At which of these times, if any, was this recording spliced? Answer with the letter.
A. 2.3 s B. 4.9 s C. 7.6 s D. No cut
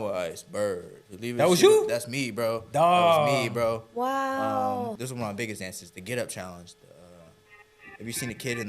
B